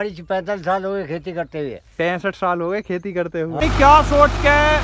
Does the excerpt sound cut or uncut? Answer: cut